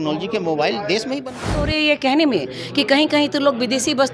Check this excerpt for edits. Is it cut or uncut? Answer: cut